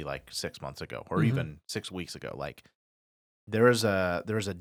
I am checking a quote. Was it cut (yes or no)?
no